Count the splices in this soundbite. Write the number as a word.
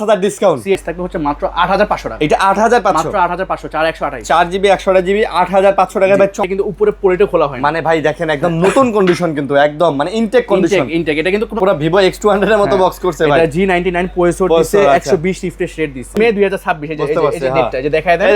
four